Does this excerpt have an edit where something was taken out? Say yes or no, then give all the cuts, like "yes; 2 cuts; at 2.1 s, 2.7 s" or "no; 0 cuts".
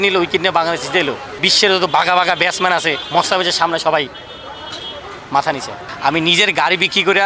yes; 3 cuts; at 1.5 s, 3.0 s, 5.8 s